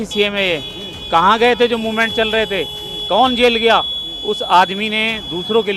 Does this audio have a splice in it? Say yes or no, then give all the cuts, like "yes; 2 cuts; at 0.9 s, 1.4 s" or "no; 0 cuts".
no; 0 cuts